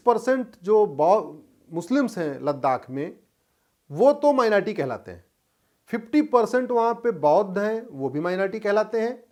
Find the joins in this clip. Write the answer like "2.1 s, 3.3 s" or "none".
none